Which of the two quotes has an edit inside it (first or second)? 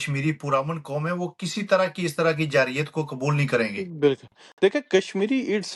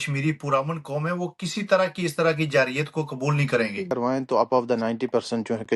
second